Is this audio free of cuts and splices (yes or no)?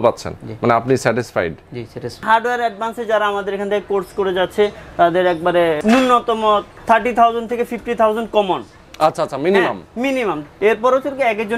no